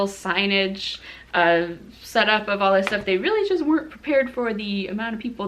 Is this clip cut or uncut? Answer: uncut